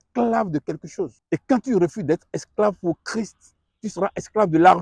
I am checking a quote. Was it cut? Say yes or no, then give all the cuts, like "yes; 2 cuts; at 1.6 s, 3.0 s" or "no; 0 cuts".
yes; 1 cut; at 1.2 s